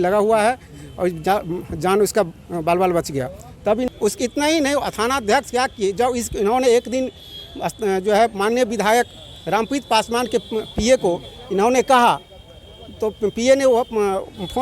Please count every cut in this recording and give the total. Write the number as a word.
one